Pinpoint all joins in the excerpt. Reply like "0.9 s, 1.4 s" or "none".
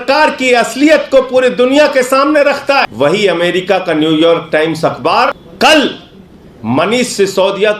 2.9 s, 5.4 s